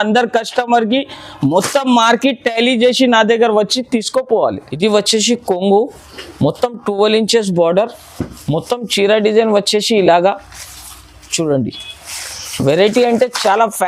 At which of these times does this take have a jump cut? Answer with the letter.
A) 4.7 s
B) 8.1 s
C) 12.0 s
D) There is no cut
A